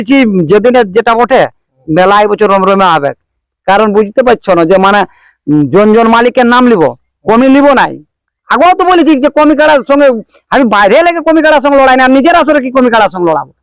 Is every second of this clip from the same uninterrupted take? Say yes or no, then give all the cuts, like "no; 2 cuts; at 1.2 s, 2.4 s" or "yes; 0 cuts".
yes; 0 cuts